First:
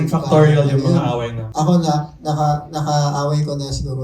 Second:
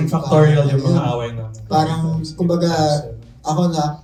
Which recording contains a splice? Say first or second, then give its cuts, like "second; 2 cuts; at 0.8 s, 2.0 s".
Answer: first; 1 cut; at 1.4 s